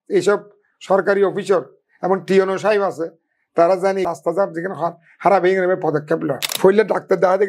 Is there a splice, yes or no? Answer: yes